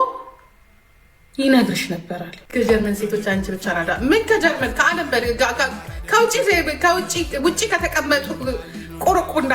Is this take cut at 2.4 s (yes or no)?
yes